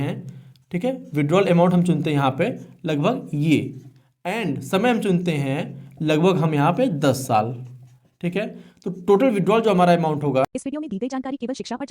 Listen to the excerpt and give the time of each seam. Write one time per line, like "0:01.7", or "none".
0:10.5